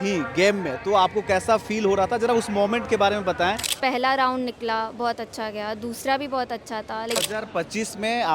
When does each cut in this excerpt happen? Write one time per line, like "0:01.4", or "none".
0:03.7
0:07.2